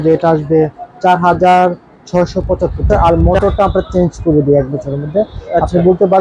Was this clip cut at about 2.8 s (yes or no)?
yes